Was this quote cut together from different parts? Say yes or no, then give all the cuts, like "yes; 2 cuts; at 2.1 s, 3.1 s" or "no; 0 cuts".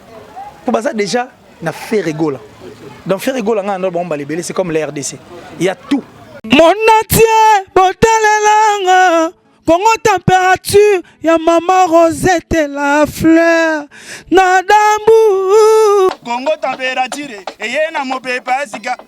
yes; 1 cut; at 6.3 s